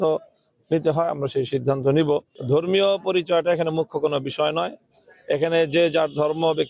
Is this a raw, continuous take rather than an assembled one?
no; 1 cut; at 2.3 s

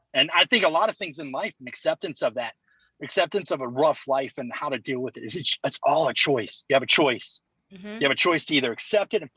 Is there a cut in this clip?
no; 0 cuts

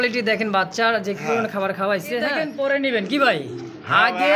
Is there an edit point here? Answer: yes; 1 cut; at 2.4 s

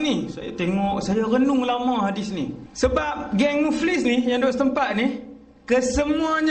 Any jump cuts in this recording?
yes; 1 cut; at 2.6 s

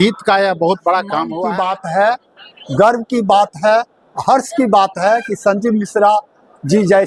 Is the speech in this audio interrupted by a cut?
yes; 1 cut; at 1.3 s

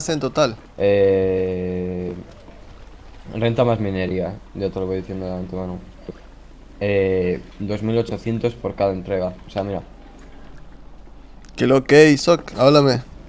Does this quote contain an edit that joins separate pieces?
no; 0 cuts

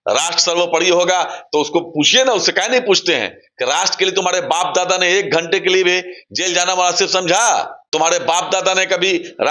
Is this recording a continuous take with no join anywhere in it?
no; 1 cut; at 7.8 s

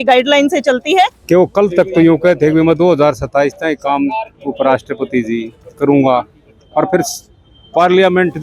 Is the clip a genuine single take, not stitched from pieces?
no; 1 cut; at 1.2 s

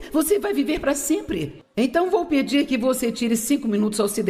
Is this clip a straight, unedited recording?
no; 1 cut; at 1.6 s

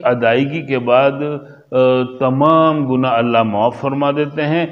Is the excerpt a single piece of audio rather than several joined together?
yes; 0 cuts

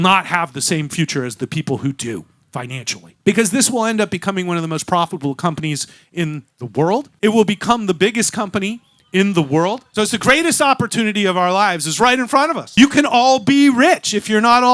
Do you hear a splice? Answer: yes; 3 cuts; at 3.1 s, 7.1 s, 9.8 s

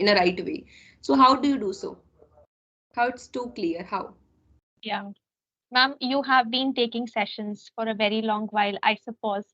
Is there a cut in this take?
yes; 1 cut; at 5.4 s

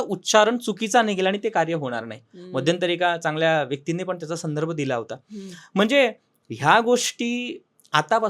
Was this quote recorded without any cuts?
yes; 0 cuts

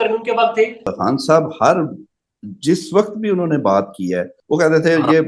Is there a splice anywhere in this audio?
yes; 2 cuts; at 0.9 s, 4.3 s

